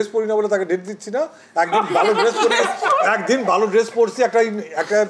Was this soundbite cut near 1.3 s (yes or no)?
no